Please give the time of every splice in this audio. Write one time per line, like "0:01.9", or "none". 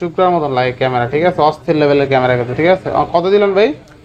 none